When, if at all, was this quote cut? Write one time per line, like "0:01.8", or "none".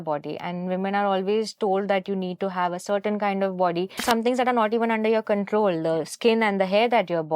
0:04.0